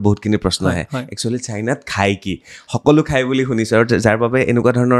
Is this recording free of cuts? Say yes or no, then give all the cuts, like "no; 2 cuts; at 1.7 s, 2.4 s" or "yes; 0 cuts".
yes; 0 cuts